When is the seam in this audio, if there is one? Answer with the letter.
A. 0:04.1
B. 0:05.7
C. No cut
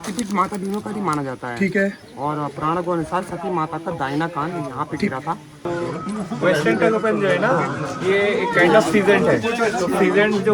B